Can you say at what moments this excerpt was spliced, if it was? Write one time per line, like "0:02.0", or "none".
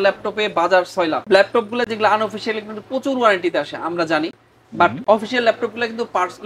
none